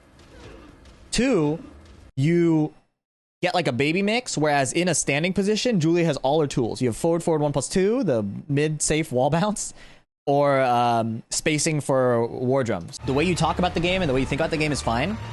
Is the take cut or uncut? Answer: cut